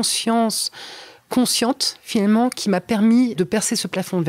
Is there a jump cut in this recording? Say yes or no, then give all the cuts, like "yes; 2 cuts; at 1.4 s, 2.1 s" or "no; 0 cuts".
yes; 1 cut; at 3.4 s